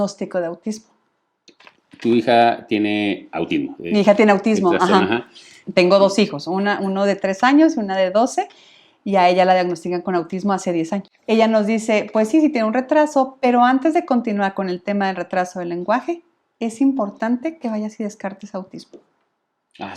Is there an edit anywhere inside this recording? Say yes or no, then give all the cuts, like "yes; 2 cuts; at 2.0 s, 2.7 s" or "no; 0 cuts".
yes; 1 cut; at 11.1 s